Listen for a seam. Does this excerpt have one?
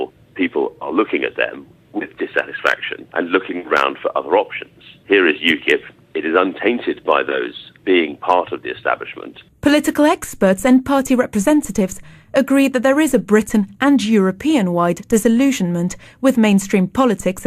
yes; 1 cut; at 8.4 s

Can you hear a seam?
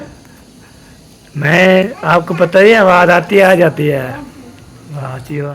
no; 0 cuts

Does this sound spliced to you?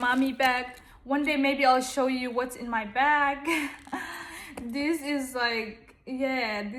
no; 0 cuts

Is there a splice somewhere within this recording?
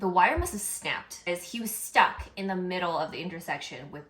yes; 1 cut; at 1.3 s

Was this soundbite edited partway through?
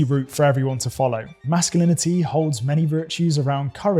yes; 1 cut; at 1.4 s

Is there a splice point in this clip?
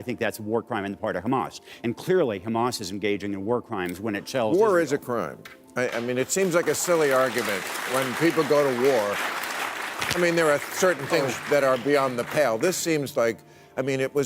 yes; 1 cut; at 1.2 s

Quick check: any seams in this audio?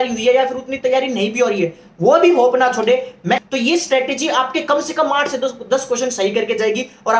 yes; 1 cut; at 3.5 s

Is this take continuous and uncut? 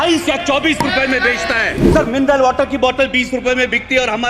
no; 1 cut; at 1.8 s

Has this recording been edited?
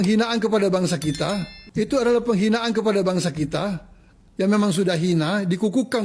yes; 1 cut; at 1.6 s

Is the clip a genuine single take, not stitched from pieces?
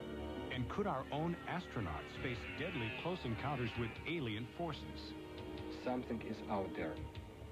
yes; 0 cuts

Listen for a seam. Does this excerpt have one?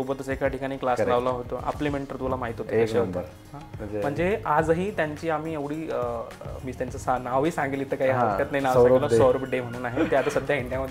no; 0 cuts

